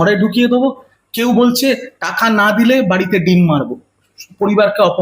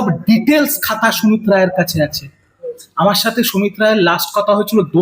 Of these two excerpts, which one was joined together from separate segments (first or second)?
second